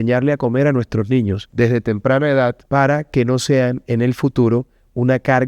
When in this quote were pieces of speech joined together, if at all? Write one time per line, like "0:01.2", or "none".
0:01.4
0:02.6

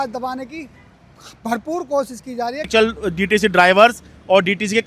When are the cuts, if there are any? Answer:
0:02.7

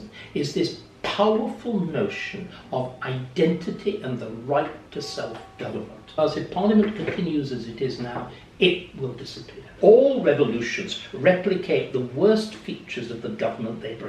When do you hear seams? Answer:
0:06.1
0:09.7

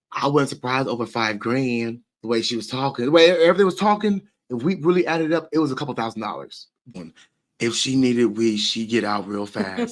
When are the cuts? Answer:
0:06.9

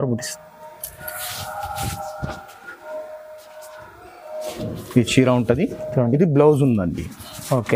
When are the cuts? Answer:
none

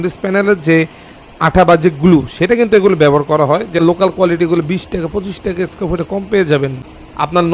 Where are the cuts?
0:03.8
0:06.8

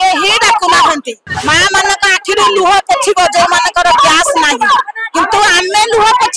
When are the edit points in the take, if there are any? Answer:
0:01.2

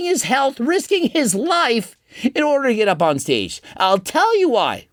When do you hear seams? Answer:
none

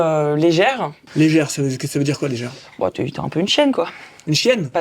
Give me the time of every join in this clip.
0:01.1

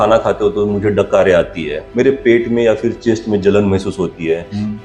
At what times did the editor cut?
0:01.8

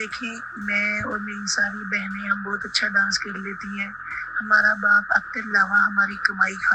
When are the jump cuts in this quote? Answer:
none

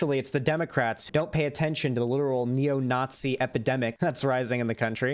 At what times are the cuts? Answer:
0:01.0
0:03.9

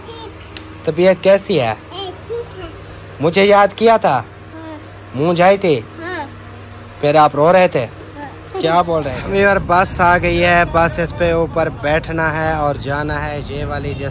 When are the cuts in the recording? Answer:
0:09.2

